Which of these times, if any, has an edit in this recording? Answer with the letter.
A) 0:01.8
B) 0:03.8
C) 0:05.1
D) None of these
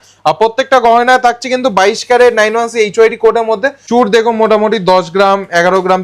B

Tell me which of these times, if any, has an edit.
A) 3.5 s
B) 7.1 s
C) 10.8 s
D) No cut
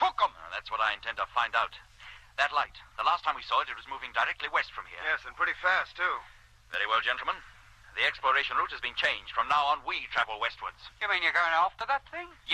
A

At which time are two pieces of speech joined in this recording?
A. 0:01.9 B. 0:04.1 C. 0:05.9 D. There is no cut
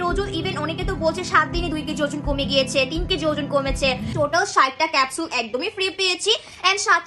B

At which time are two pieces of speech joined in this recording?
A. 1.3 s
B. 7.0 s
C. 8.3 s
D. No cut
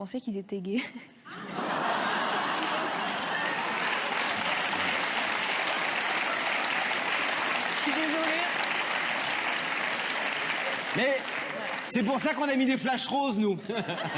B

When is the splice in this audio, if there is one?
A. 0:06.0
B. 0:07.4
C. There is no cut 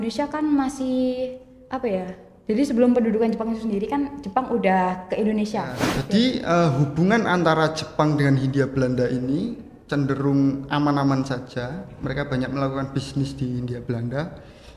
A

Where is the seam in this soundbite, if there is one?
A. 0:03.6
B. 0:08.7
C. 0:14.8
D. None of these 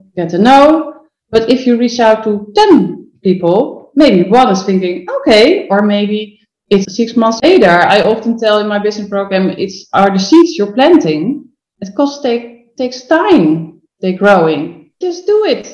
C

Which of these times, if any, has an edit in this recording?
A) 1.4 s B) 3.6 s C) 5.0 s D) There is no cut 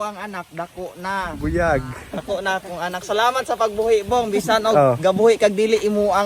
D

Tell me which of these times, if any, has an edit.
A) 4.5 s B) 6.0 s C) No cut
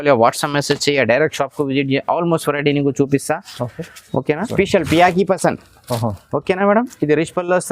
A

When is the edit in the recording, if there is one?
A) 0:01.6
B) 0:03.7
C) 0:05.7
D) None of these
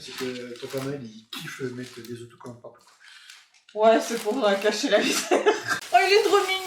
C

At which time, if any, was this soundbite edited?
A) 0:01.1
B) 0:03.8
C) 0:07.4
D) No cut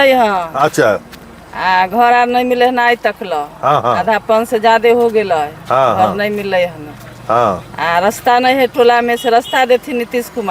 D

